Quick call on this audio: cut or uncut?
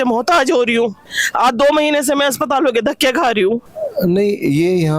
cut